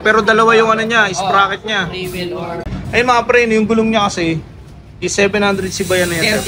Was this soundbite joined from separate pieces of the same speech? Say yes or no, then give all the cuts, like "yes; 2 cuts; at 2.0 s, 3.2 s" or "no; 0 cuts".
yes; 1 cut; at 2.7 s